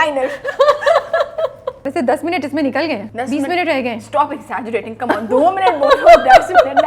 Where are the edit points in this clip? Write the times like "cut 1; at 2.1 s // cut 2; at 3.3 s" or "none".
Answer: cut 1; at 1.8 s // cut 2; at 3.1 s